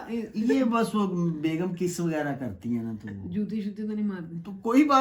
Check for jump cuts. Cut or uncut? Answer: uncut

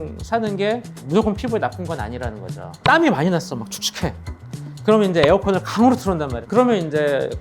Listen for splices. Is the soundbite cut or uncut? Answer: cut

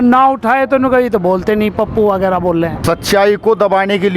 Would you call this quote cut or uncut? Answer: cut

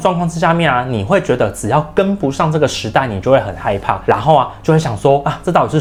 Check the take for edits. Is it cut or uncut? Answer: uncut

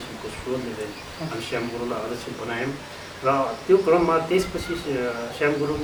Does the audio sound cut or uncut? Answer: uncut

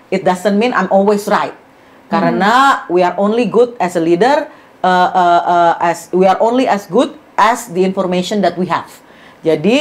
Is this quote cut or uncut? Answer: uncut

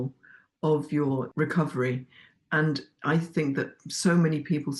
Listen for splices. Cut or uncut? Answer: cut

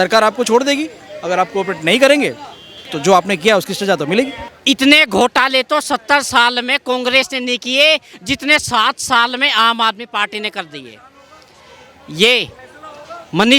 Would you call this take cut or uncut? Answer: cut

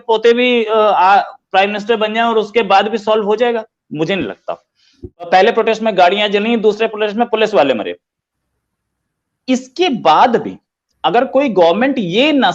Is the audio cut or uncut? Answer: cut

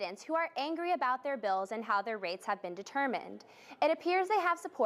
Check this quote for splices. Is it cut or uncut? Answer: uncut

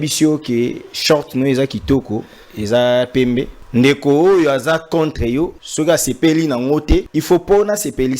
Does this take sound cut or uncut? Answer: cut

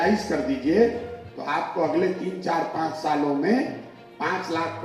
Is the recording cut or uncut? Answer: uncut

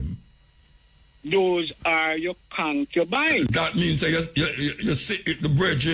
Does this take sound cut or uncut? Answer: uncut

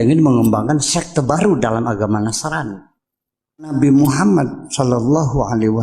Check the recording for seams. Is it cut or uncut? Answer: cut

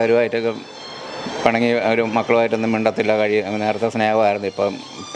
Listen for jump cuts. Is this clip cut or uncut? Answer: uncut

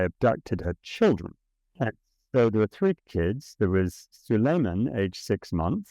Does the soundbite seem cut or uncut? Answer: cut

